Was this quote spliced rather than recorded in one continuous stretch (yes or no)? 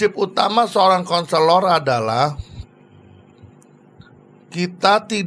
no